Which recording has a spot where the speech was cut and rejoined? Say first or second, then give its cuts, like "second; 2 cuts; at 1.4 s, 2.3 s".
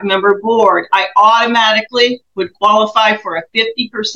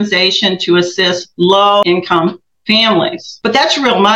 second; 2 cuts; at 1.8 s, 3.3 s